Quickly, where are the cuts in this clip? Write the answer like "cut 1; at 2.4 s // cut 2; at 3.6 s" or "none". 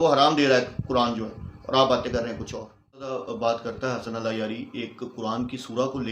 cut 1; at 3.1 s